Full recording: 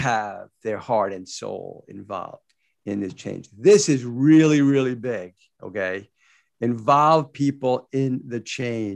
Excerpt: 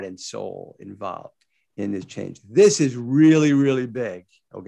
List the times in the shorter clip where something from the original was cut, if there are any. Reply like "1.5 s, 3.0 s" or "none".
none